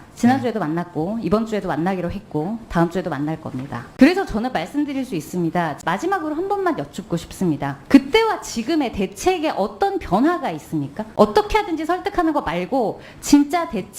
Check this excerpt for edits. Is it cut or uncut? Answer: cut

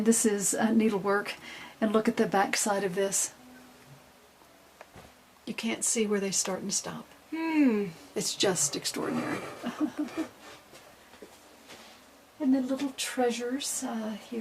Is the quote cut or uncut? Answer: cut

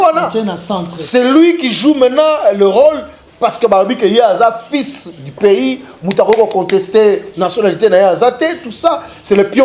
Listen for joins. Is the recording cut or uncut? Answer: uncut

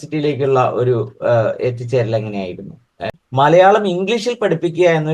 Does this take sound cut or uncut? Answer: cut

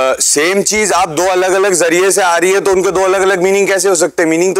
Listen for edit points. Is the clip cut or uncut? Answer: uncut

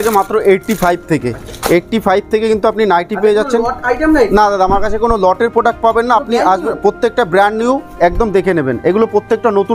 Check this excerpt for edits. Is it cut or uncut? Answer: uncut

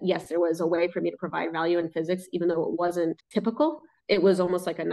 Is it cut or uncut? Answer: cut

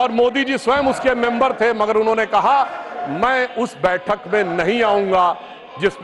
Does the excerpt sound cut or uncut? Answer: uncut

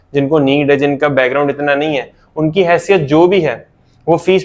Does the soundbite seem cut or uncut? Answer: uncut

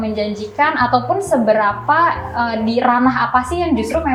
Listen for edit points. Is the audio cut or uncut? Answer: uncut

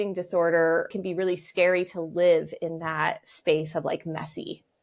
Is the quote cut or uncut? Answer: cut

